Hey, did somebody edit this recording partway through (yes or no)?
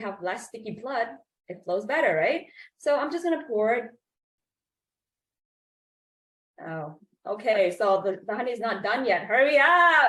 no